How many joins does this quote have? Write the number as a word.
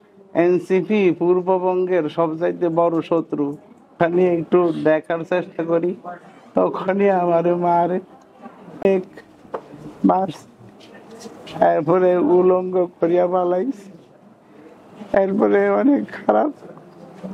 one